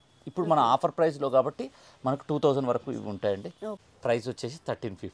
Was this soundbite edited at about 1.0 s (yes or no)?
no